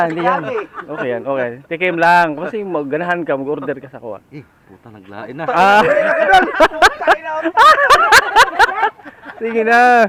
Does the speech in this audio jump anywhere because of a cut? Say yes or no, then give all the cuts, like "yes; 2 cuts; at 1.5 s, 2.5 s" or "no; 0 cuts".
no; 0 cuts